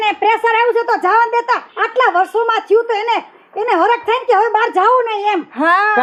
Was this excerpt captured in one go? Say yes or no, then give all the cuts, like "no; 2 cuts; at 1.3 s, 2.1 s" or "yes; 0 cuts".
yes; 0 cuts